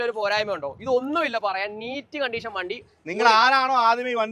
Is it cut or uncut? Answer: uncut